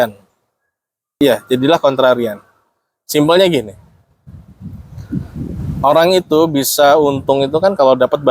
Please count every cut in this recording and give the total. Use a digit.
1